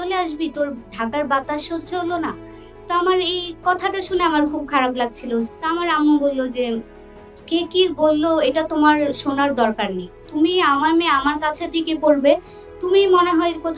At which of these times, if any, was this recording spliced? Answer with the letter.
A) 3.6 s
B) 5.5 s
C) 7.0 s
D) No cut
B